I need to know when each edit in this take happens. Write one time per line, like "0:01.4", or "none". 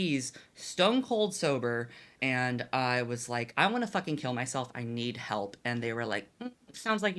0:02.2